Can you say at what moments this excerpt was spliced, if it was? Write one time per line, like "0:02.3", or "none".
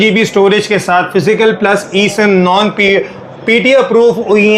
none